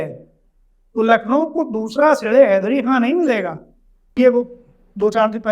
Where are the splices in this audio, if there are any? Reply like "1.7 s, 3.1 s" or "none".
4.2 s